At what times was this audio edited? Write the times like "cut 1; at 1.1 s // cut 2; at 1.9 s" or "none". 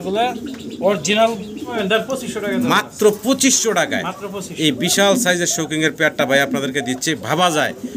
cut 1; at 1.8 s